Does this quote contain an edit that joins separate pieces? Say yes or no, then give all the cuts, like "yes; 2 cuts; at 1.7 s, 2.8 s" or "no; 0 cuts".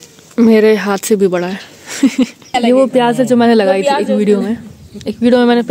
yes; 1 cut; at 2.5 s